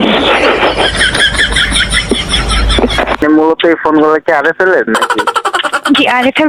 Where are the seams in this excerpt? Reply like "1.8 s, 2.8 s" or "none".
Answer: 3.2 s